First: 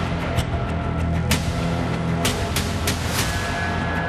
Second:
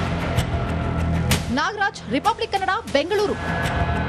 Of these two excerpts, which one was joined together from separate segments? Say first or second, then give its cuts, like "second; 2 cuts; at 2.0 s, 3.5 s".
second; 1 cut; at 1.3 s